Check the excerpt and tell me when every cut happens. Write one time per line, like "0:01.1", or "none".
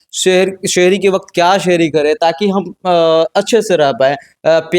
none